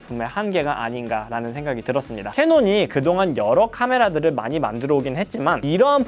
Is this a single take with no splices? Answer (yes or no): no